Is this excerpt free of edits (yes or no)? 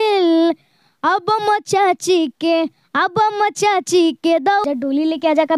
no